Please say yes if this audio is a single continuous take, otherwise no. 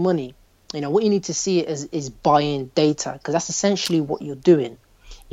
yes